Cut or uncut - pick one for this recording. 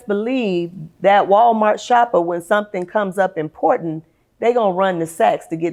uncut